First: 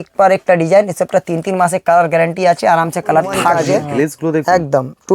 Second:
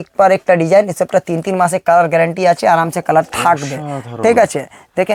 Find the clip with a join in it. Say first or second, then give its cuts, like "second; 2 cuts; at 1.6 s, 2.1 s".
first; 1 cut; at 3.6 s